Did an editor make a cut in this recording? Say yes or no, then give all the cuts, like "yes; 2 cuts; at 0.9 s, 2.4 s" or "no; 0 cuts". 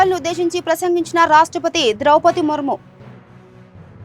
no; 0 cuts